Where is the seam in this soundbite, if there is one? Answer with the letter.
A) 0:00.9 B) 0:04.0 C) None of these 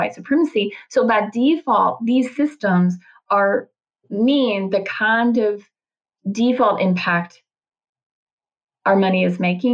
B